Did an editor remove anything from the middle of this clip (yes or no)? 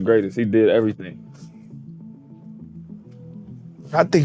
no